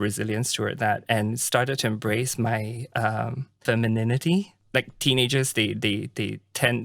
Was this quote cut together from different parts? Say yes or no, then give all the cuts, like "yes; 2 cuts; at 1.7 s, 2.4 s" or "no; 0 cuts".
yes; 2 cuts; at 3.6 s, 4.6 s